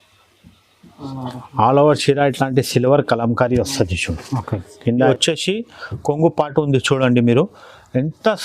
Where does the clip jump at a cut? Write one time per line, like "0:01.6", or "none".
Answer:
0:05.1